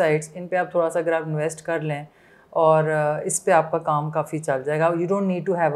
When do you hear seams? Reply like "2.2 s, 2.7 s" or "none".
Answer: none